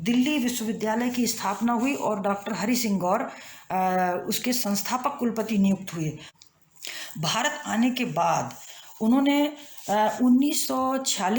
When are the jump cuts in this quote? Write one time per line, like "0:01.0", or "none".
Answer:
0:06.2